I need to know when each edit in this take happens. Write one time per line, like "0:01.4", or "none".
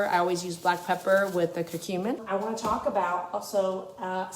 0:02.2